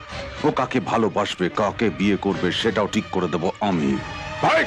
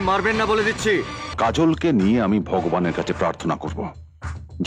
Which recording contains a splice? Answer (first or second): second